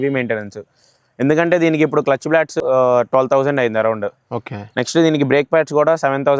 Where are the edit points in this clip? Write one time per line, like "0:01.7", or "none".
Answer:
0:02.6